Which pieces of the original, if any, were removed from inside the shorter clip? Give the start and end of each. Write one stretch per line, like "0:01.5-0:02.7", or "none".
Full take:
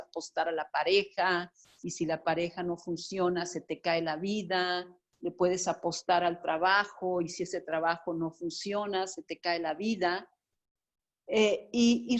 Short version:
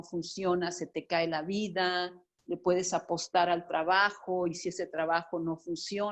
none